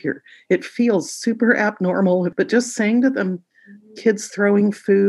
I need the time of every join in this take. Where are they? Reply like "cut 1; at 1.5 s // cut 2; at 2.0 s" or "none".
cut 1; at 2.3 s